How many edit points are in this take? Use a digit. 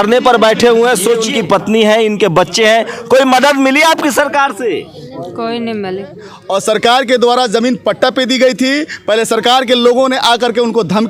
2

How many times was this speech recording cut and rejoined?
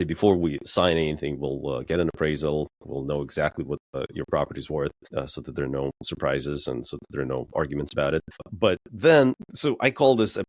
4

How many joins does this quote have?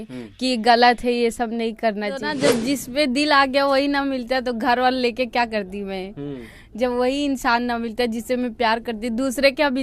1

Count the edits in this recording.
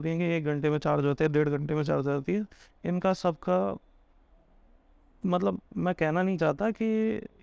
0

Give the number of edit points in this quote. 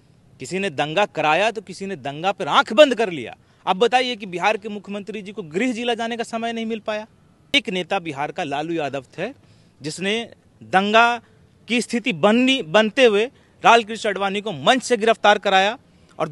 1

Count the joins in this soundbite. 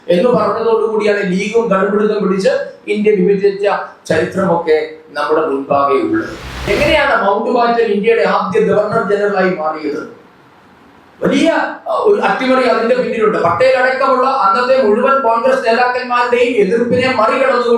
1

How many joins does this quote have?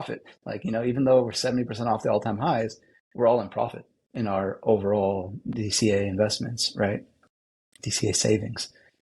0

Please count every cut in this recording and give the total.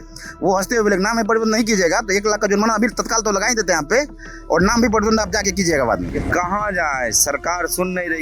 1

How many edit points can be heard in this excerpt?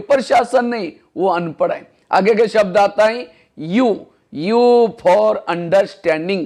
0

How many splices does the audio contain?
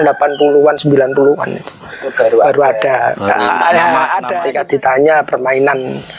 1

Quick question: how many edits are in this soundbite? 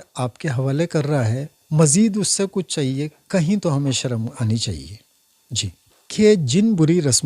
1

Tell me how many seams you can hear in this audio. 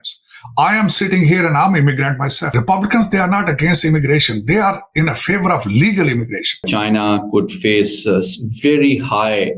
2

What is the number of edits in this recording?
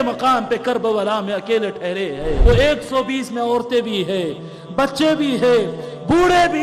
1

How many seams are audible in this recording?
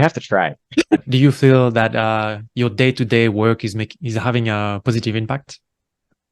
1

